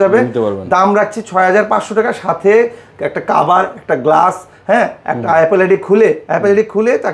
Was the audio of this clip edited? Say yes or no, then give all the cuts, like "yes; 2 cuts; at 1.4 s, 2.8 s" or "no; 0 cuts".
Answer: no; 0 cuts